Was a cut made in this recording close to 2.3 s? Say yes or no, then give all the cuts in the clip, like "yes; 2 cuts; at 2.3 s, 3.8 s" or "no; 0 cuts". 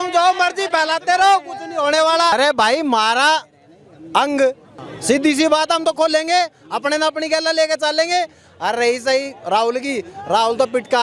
no; 0 cuts